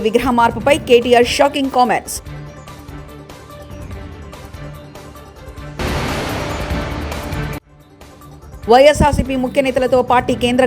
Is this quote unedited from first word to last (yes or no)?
yes